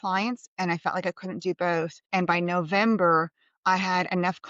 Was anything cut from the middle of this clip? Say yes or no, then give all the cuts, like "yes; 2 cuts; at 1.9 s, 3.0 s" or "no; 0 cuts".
yes; 1 cut; at 2.0 s